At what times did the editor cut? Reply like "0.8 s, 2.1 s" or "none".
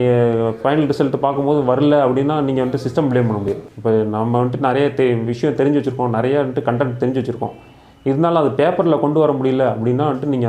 3.7 s